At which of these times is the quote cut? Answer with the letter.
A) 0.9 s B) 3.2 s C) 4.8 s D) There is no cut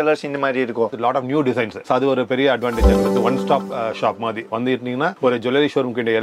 A